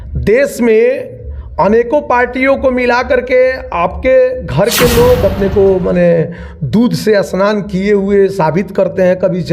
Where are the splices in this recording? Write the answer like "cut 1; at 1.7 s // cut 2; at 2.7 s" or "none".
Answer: cut 1; at 5.2 s